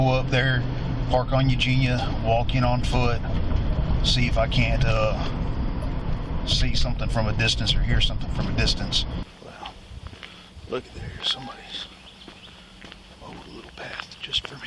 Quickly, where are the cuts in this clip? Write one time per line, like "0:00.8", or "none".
0:06.0
0:09.2